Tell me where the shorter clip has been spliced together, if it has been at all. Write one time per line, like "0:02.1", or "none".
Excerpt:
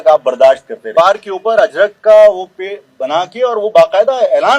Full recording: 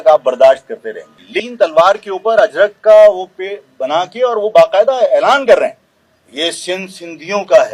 0:00.9